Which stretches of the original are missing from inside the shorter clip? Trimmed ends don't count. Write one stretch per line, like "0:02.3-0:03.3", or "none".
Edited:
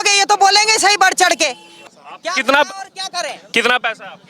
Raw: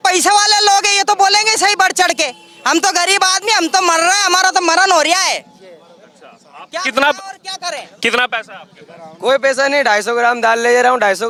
0:02.5-0:06.2